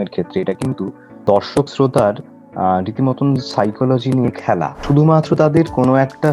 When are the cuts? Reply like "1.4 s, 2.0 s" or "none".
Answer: 4.7 s